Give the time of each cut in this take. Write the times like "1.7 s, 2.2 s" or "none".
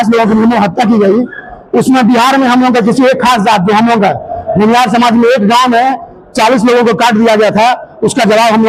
none